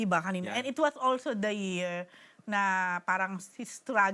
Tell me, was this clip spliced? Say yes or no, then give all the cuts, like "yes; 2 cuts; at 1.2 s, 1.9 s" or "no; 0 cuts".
no; 0 cuts